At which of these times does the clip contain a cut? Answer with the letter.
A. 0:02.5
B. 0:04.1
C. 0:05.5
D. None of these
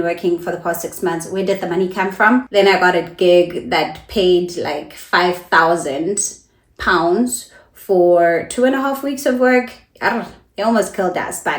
A